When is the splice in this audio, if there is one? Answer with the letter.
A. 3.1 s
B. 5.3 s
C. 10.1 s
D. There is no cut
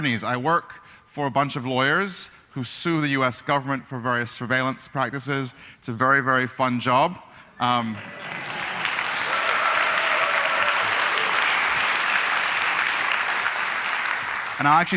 C